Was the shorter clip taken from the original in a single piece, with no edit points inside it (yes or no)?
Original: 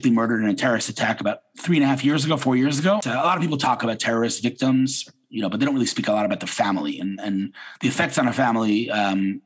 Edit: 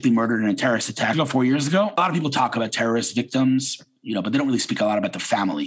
no